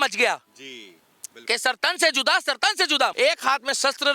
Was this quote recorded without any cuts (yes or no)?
no